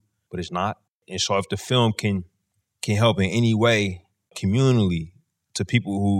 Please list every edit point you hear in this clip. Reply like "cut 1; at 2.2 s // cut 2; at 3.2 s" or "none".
cut 1; at 1.0 s // cut 2; at 4.4 s